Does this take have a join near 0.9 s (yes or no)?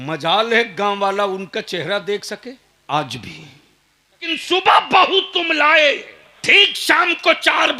no